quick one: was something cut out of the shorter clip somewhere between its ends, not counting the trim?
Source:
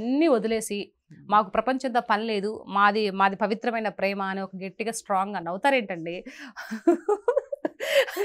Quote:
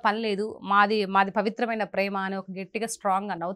no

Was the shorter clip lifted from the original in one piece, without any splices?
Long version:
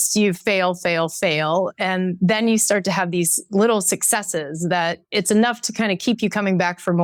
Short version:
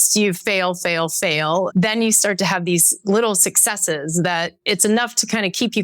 no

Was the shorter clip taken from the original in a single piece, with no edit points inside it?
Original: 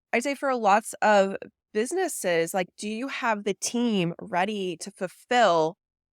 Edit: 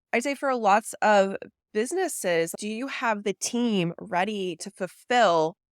no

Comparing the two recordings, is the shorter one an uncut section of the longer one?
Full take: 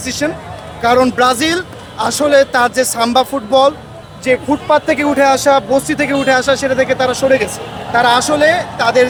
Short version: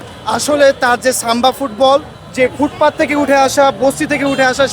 no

